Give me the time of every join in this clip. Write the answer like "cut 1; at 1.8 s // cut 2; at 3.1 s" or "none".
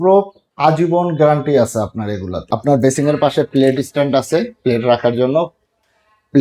cut 1; at 2.4 s